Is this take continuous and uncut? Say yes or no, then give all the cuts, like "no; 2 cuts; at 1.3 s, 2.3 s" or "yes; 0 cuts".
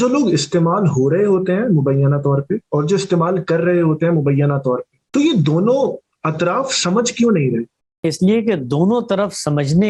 no; 2 cuts; at 4.9 s, 7.8 s